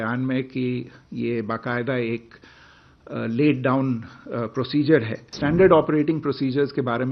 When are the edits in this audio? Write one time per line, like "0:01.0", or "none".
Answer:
0:05.3